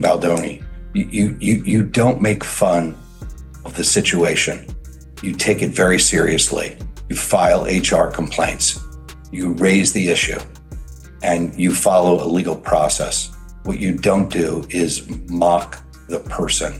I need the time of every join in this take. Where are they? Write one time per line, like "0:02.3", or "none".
none